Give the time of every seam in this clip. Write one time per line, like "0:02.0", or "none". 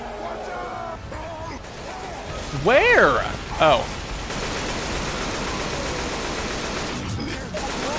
0:00.9